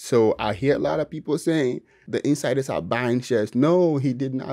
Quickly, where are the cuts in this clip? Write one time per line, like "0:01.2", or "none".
0:02.0